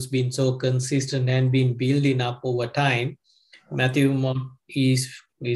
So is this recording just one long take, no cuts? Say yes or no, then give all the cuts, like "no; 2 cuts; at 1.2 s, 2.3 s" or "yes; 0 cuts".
yes; 0 cuts